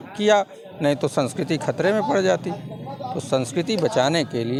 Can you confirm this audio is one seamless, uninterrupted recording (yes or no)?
yes